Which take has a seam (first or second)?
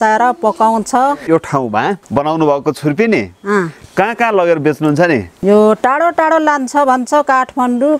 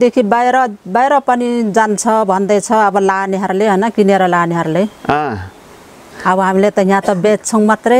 first